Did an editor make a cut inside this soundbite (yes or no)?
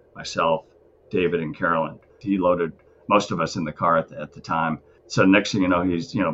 yes